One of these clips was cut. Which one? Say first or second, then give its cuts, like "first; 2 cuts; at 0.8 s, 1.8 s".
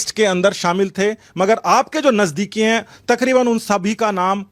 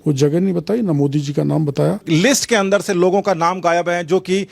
second; 1 cut; at 2.0 s